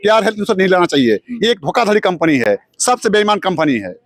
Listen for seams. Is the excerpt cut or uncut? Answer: uncut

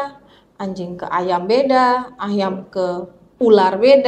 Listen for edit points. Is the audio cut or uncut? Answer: uncut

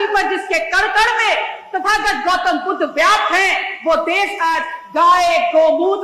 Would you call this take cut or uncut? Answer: uncut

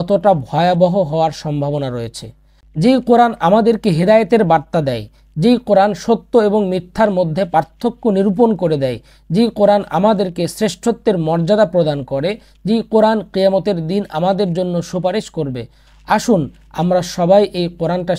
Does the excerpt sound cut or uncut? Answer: uncut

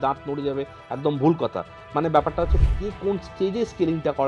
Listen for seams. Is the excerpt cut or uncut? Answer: uncut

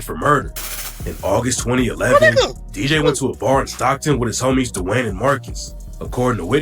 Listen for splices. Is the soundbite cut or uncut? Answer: uncut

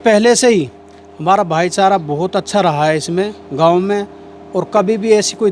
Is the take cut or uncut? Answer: uncut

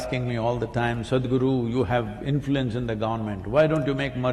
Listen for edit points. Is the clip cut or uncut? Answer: uncut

